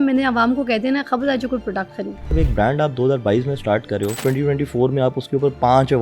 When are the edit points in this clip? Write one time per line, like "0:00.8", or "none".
0:02.2
0:04.2